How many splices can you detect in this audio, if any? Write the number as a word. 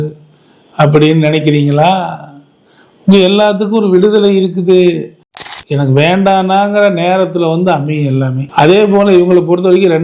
one